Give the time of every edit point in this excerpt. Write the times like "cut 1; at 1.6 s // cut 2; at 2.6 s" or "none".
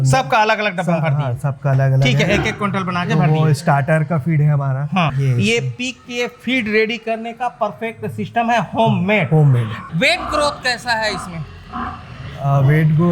cut 1; at 5.2 s // cut 2; at 9.8 s